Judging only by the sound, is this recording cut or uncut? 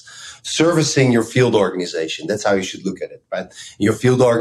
uncut